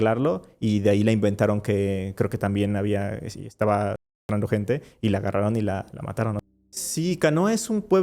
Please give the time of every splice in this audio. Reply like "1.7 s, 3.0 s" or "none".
6.5 s